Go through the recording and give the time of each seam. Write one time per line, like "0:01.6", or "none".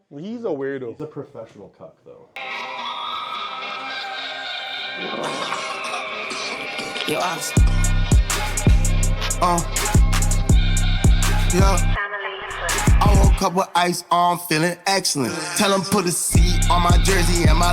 0:02.3